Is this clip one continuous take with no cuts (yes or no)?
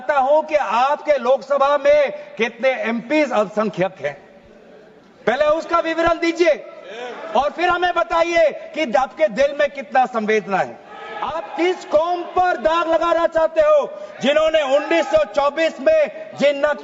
no